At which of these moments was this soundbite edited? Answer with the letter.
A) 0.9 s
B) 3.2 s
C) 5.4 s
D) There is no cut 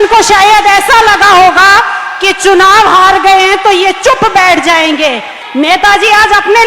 C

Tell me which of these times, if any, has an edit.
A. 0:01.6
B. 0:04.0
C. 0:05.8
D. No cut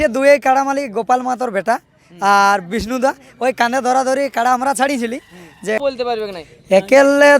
C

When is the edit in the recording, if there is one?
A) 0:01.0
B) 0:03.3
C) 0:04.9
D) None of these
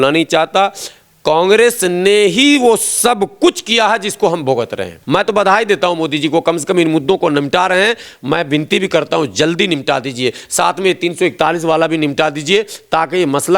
C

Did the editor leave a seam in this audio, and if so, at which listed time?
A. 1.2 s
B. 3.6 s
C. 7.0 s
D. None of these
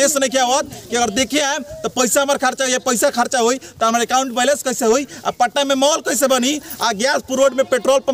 D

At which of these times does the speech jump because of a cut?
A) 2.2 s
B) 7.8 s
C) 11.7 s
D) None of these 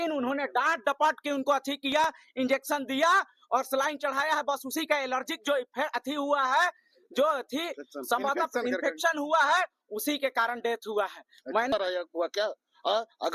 C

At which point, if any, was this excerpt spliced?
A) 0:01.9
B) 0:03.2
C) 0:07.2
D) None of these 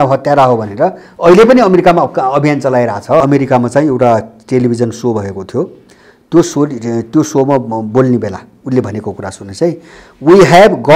B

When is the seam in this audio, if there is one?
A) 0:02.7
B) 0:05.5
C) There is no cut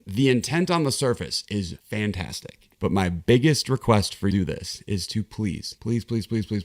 A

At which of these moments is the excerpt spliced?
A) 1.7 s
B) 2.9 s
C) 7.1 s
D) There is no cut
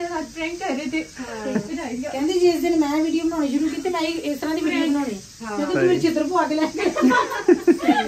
A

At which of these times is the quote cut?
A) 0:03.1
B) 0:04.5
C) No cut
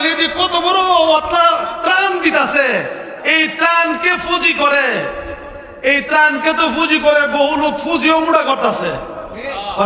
A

